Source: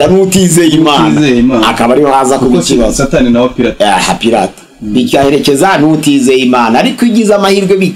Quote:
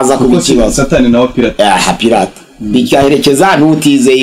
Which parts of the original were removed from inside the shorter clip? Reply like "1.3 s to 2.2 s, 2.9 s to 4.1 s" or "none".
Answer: none